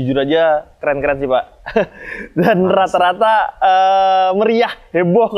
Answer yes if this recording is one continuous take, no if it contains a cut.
yes